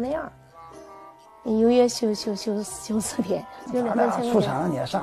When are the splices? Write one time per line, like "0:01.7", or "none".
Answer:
0:03.6